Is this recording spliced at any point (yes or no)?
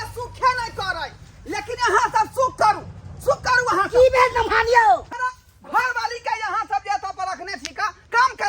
yes